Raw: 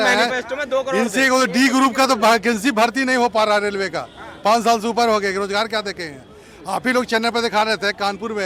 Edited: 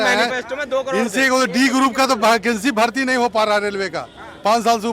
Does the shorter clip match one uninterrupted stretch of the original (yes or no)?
yes